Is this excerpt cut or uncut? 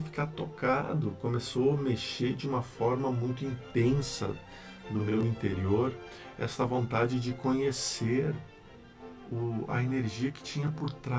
uncut